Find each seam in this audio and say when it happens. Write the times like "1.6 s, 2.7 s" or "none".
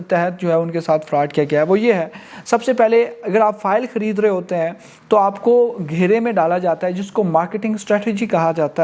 none